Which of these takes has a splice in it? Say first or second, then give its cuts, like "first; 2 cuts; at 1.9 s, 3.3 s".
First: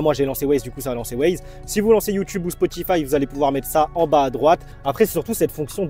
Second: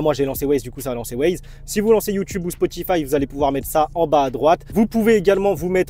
first; 1 cut; at 4.7 s